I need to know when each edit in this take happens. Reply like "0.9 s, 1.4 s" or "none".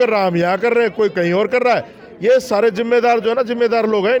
none